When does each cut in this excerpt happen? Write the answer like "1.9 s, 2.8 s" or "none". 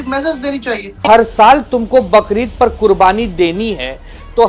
1.0 s